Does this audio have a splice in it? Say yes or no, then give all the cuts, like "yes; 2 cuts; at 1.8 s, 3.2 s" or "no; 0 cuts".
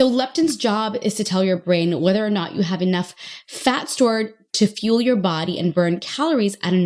no; 0 cuts